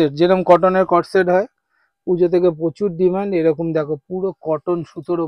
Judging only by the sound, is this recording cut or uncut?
uncut